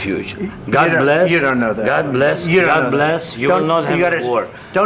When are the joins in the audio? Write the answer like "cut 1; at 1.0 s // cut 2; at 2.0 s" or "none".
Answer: none

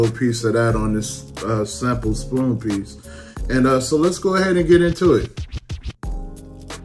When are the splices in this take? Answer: cut 1; at 5.3 s

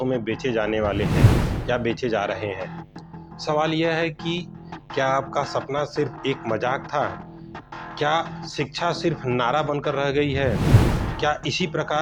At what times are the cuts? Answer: none

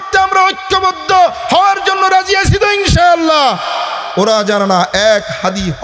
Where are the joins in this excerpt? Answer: cut 1; at 4.0 s

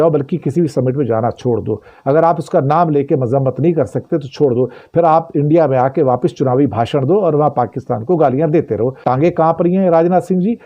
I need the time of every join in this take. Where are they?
cut 1; at 9.0 s

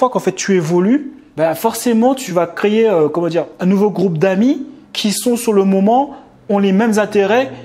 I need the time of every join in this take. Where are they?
cut 1; at 2.2 s // cut 2; at 3.5 s

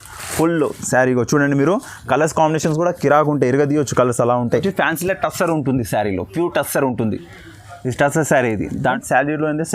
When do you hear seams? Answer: cut 1; at 4.6 s // cut 2; at 8.8 s

